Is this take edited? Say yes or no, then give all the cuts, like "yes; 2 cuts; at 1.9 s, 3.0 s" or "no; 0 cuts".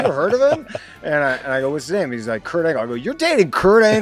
no; 0 cuts